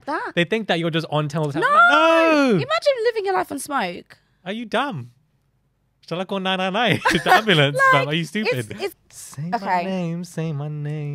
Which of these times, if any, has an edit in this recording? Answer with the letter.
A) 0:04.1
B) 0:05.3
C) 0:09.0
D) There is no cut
C